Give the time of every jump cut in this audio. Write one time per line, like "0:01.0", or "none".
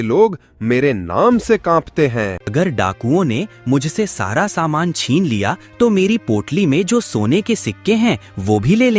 0:02.4

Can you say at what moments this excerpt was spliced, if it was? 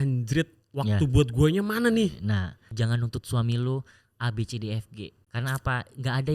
0:02.7
0:05.2

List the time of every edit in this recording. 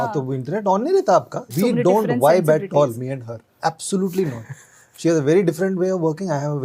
0:01.4

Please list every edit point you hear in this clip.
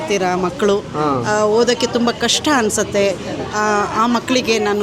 none

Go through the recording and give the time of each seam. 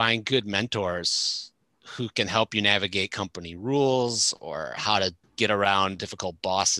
0:05.2

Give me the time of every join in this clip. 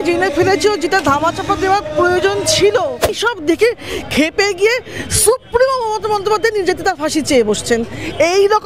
0:03.2

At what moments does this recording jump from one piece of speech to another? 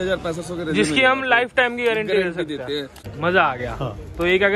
0:03.0

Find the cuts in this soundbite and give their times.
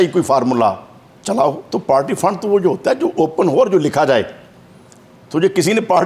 0:01.6

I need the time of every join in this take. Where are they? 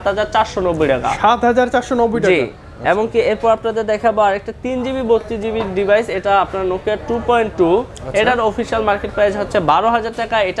none

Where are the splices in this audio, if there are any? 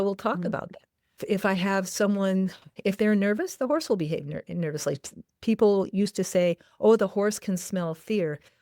0:02.7

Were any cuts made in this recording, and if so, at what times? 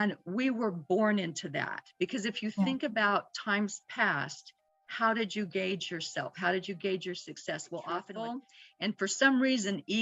0:08.2

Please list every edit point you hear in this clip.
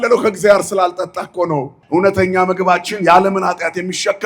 0:01.7

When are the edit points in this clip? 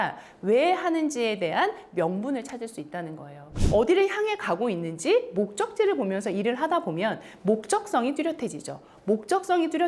0:03.5

